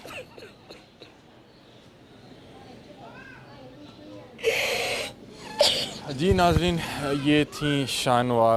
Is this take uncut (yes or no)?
yes